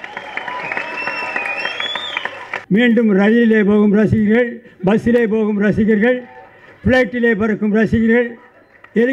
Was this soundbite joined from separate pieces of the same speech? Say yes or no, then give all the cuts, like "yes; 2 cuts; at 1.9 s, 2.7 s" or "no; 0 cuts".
yes; 1 cut; at 2.5 s